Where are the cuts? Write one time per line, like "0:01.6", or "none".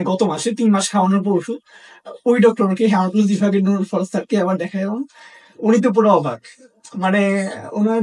none